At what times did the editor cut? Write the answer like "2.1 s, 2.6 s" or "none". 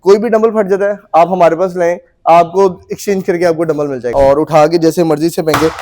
4.1 s